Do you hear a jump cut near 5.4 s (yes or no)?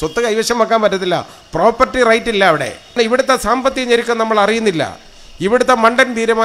no